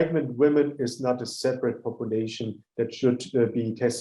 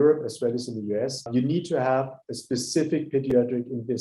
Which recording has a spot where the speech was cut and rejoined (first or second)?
second